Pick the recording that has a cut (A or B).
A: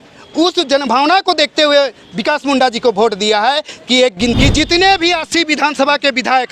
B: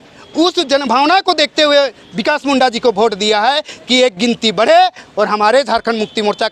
A